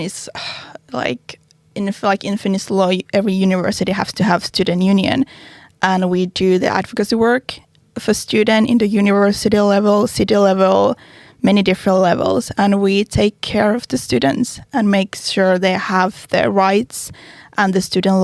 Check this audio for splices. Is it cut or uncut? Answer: uncut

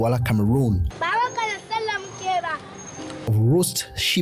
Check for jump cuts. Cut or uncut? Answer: cut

